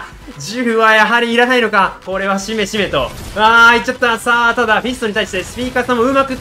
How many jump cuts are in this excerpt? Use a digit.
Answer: 1